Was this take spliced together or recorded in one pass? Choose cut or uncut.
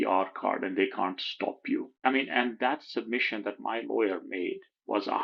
cut